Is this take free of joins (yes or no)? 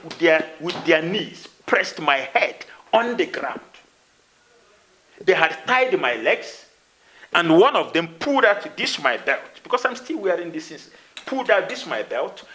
yes